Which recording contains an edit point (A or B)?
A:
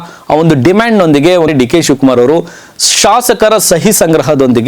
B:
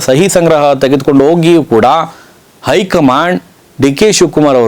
A